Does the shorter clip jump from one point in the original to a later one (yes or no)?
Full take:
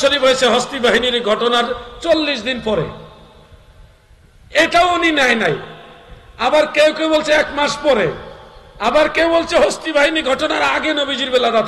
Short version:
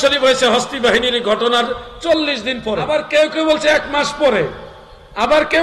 yes